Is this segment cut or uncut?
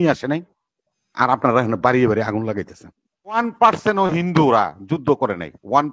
cut